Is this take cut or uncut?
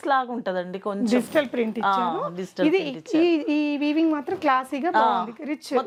uncut